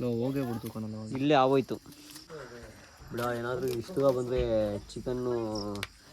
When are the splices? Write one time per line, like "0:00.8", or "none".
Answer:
0:02.3